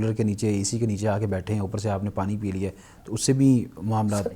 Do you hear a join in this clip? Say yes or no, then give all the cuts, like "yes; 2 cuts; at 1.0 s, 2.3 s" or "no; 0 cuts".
no; 0 cuts